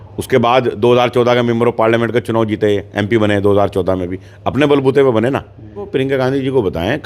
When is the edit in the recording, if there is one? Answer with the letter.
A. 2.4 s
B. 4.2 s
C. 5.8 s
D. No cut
C